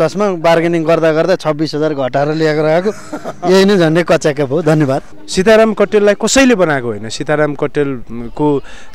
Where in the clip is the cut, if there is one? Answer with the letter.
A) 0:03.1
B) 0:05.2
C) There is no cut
B